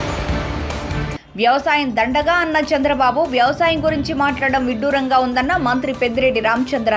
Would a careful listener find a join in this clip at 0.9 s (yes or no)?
yes